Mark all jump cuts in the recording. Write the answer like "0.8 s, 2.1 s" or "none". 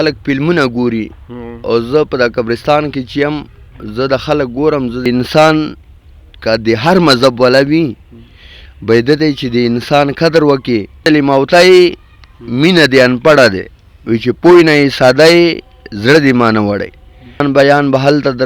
5.1 s, 10.9 s, 17.4 s